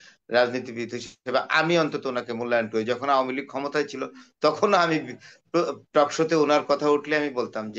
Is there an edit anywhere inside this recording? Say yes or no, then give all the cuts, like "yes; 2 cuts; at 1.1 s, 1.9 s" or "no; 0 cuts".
no; 0 cuts